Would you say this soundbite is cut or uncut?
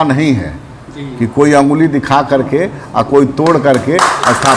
uncut